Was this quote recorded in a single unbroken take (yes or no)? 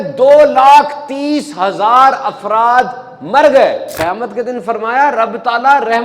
no